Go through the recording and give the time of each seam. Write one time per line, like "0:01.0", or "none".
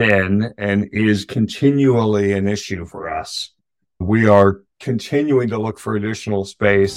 none